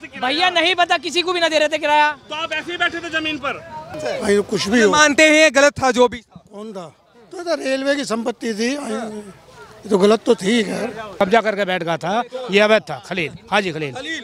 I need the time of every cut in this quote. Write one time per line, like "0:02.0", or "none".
0:04.0
0:11.2